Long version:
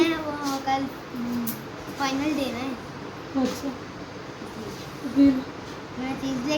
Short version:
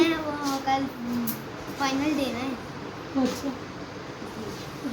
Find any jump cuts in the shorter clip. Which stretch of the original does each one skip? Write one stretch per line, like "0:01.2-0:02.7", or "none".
0:01.0-0:01.2